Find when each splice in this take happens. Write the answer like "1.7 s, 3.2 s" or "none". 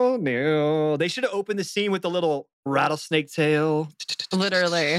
2.7 s